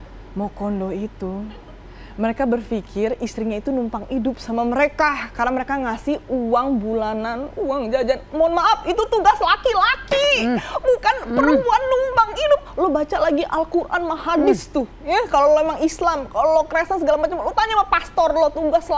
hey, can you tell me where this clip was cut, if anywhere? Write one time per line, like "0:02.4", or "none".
none